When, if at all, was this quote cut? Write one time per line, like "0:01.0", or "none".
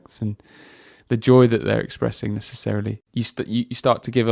0:03.0